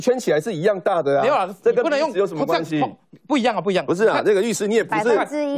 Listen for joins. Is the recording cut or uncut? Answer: uncut